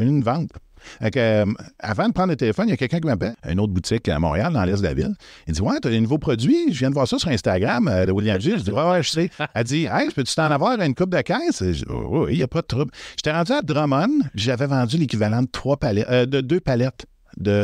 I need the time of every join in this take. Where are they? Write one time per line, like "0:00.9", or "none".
0:03.3